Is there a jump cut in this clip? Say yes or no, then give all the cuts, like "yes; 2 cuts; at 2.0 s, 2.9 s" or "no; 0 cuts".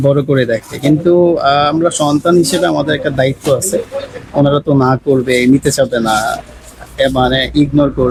no; 0 cuts